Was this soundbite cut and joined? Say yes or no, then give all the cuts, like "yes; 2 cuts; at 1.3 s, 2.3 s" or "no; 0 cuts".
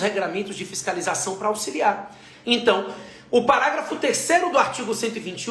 no; 0 cuts